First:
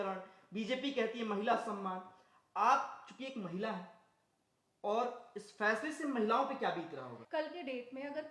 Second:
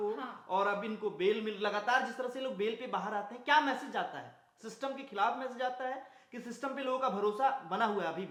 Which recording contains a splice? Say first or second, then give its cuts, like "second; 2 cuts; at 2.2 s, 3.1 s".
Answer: first; 1 cut; at 7.2 s